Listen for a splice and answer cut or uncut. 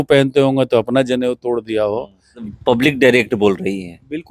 cut